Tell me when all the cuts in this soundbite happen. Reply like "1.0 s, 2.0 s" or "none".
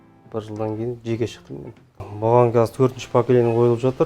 2.0 s